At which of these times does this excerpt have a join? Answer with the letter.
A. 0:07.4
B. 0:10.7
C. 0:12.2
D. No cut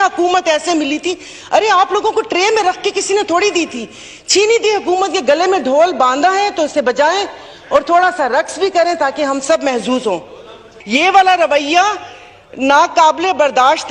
B